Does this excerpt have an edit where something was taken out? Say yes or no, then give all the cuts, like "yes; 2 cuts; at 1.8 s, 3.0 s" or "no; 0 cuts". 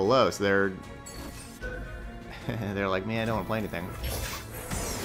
no; 0 cuts